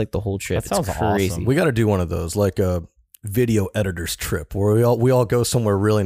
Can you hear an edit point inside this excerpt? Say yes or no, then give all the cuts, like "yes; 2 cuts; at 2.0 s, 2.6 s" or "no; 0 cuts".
yes; 1 cut; at 1.4 s